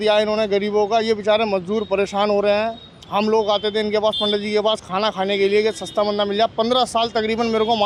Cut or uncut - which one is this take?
uncut